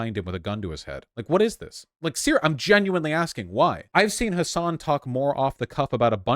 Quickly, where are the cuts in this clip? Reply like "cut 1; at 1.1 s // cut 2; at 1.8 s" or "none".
cut 1; at 3.8 s